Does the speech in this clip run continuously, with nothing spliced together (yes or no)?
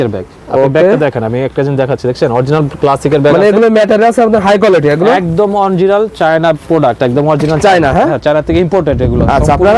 yes